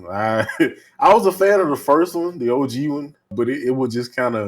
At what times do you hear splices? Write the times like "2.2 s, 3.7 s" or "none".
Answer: 3.3 s